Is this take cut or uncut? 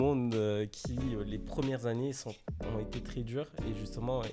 uncut